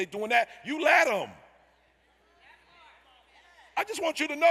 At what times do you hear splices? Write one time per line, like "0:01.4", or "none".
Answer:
none